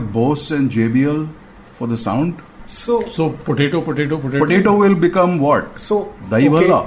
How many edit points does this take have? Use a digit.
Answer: 0